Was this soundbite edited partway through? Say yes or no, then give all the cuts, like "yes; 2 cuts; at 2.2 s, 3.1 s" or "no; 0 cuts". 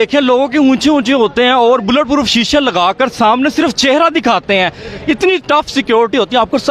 no; 0 cuts